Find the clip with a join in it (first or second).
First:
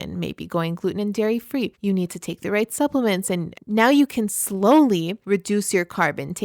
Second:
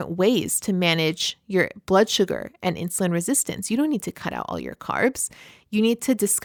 first